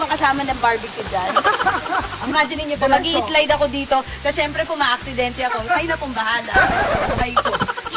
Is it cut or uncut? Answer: cut